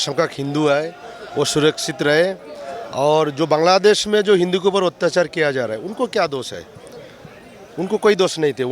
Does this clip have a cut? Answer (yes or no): no